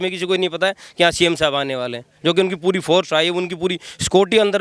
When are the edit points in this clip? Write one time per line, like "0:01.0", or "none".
none